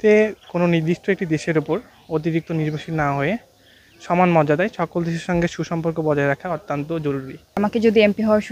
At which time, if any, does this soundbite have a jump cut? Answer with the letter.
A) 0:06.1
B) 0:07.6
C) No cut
B